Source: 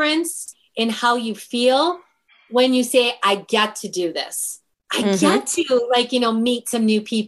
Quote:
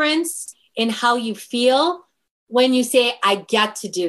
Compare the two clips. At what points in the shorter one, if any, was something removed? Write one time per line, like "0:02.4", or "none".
none